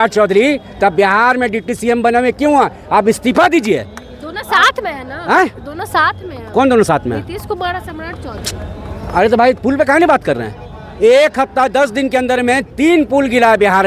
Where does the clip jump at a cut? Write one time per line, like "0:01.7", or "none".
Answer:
none